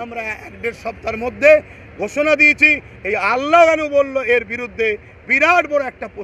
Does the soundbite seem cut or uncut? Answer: uncut